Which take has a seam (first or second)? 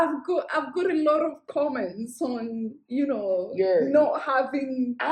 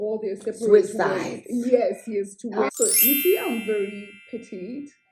second